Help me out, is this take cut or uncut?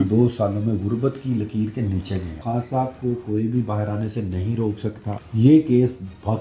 cut